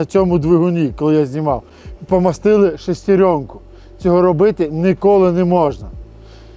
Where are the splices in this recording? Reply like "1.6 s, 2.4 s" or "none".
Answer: none